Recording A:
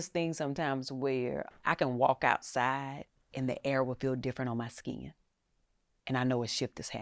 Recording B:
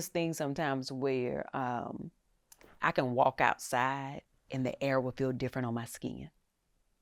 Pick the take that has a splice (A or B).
A